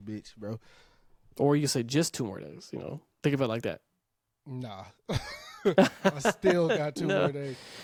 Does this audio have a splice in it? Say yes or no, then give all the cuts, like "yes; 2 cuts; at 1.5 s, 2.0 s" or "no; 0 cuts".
no; 0 cuts